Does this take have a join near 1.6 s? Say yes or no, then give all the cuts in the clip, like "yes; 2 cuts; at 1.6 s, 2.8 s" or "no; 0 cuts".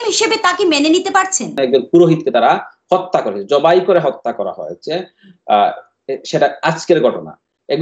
yes; 1 cut; at 1.6 s